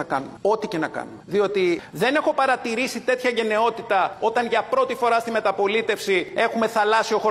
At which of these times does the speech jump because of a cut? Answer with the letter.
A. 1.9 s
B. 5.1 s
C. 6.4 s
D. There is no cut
A